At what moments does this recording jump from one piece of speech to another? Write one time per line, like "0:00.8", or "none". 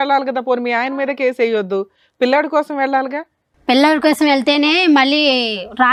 none